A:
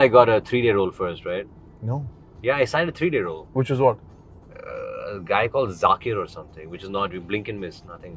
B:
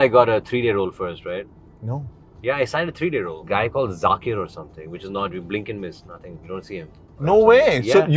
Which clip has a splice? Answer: B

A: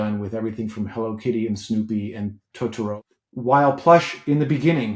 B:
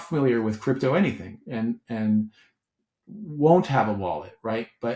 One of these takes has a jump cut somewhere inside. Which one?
A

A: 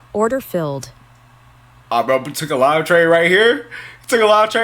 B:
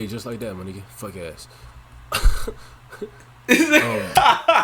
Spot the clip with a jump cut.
A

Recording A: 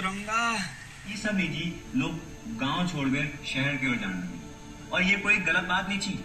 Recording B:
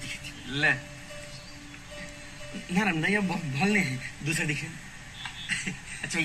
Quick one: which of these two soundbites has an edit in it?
A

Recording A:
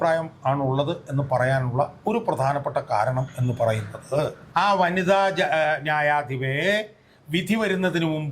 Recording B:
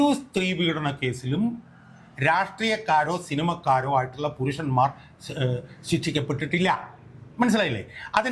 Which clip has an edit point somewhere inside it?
A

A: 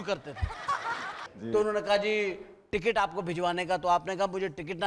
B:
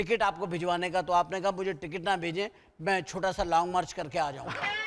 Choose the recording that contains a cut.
A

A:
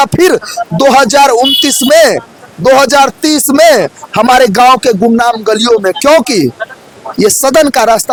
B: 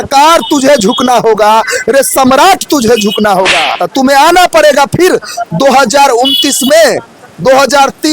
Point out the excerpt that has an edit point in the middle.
B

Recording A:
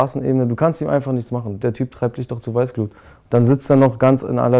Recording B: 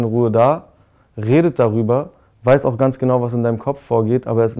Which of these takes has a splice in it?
A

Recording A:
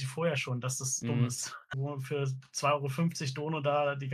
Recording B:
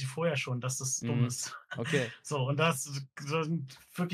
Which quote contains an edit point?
A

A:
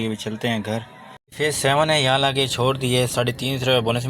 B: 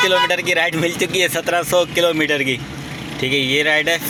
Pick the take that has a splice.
A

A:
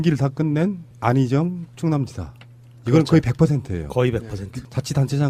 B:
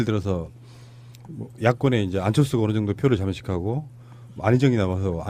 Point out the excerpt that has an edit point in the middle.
A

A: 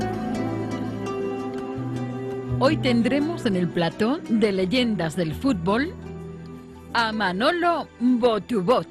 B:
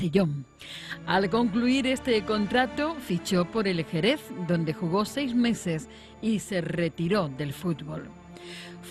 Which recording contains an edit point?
B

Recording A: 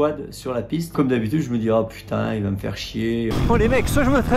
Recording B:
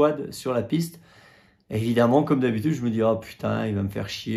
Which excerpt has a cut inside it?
A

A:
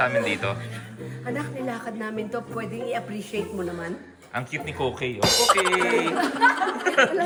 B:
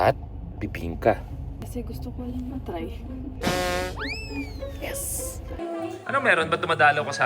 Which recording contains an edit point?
B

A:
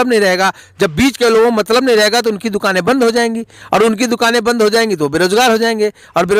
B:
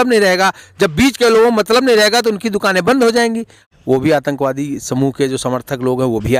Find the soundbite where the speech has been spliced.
B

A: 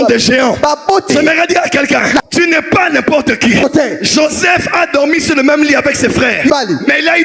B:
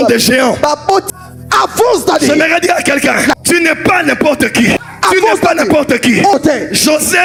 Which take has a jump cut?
A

